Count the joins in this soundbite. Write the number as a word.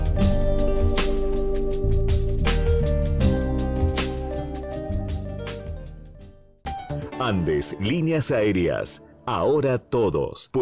zero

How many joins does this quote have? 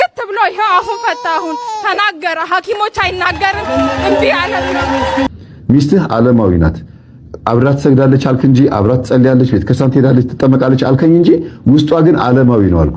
one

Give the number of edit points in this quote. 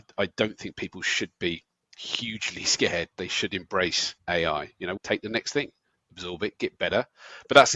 two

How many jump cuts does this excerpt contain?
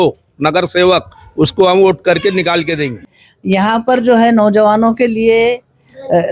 one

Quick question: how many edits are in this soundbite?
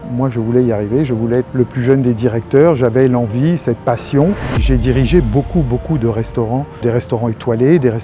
three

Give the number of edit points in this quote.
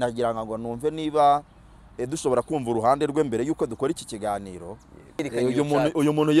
one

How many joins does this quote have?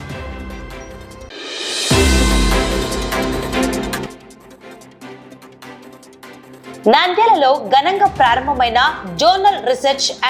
zero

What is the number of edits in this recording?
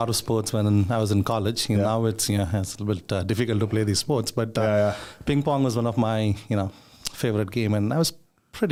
zero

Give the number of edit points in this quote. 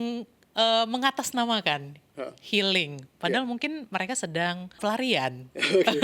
one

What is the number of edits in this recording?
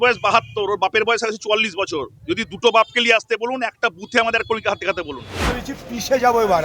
one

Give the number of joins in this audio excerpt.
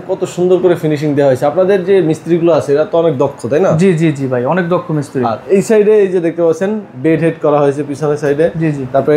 zero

